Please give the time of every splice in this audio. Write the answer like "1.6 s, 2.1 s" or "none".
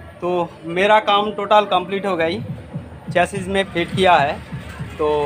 3.7 s